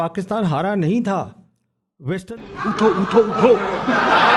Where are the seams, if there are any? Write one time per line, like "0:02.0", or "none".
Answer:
0:02.2